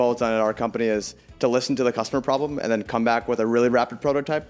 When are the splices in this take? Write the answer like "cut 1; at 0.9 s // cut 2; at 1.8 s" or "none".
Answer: none